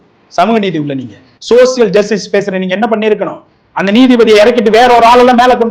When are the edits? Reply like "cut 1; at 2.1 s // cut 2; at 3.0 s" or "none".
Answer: none